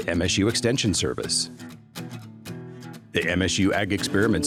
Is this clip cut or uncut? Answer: uncut